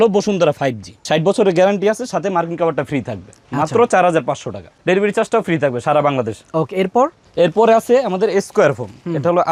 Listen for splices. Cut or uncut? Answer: uncut